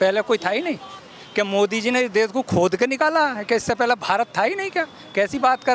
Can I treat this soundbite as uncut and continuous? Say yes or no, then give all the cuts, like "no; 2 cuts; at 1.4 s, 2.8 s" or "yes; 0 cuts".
yes; 0 cuts